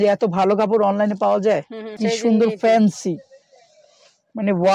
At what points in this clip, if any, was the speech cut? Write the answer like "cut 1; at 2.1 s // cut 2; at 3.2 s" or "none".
cut 1; at 1.9 s